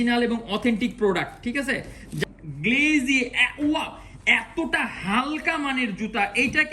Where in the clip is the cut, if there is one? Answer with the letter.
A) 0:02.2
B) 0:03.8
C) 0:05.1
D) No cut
A